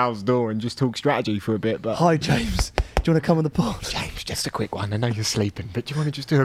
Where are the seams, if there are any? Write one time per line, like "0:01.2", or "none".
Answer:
0:02.0